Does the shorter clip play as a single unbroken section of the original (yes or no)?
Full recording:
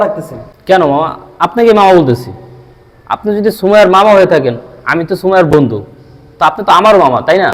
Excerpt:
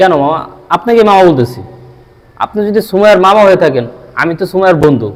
yes